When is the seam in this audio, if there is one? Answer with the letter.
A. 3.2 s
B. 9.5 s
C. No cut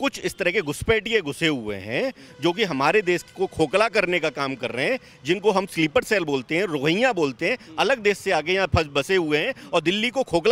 C